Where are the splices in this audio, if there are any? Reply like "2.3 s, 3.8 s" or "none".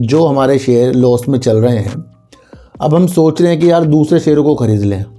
none